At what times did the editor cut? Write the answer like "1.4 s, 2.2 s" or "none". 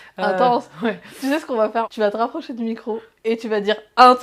1.9 s